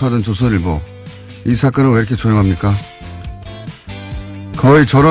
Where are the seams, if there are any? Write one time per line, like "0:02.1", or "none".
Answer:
0:02.8